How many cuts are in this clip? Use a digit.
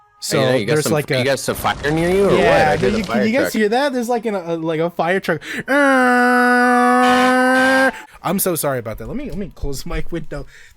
1